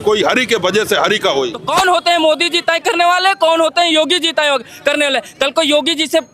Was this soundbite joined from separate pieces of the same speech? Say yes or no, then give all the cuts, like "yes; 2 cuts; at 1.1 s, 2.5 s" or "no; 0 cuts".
yes; 1 cut; at 1.6 s